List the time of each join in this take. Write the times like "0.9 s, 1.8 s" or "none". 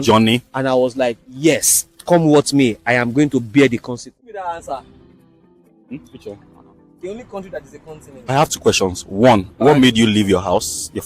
4.3 s, 8.3 s